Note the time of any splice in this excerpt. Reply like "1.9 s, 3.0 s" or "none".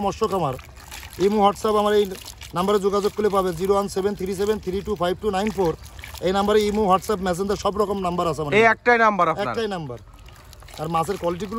none